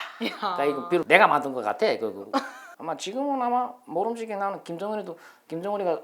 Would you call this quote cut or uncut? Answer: cut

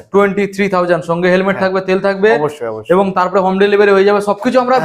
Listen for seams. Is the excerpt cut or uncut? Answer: uncut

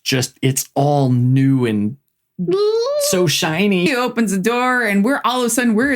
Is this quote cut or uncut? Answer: cut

